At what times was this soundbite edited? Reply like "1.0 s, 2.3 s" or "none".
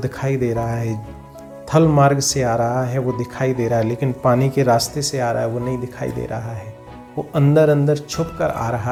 none